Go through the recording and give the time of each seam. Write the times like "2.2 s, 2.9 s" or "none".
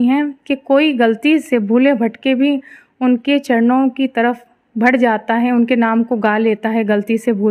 none

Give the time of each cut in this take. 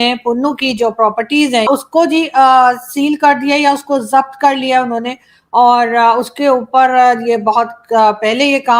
1.7 s

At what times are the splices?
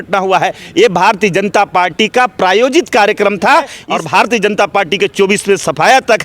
3.8 s

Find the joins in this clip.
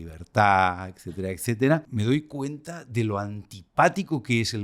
1.9 s

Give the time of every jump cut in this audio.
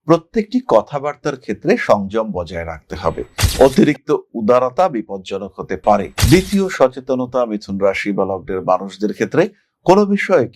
6.1 s

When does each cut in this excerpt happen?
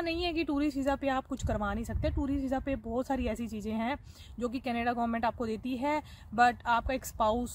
none

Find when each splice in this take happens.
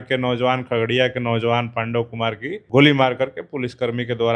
2.5 s

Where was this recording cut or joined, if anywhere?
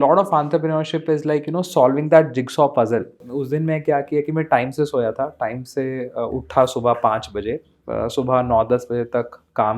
3.2 s

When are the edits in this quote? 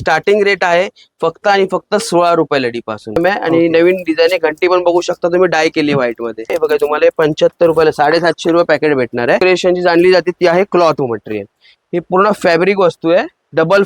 3.2 s, 6.5 s, 9.4 s

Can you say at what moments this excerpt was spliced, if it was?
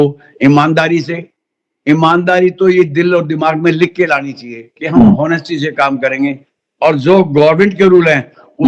none

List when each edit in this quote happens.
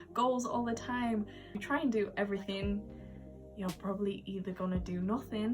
1.5 s

